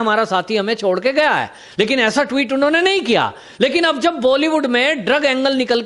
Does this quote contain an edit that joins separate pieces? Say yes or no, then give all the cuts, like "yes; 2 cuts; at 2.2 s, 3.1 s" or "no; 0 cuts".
no; 0 cuts